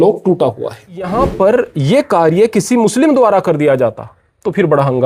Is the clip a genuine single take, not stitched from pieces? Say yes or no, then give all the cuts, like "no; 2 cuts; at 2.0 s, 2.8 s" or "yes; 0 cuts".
no; 1 cut; at 1.1 s